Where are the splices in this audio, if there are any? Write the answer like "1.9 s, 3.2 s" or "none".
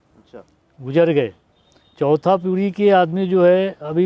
none